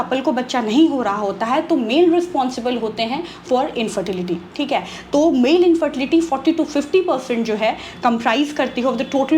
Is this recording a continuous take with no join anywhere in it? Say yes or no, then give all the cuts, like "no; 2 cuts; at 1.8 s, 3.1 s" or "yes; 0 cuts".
yes; 0 cuts